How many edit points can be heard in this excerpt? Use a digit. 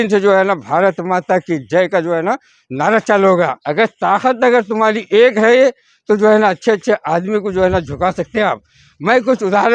1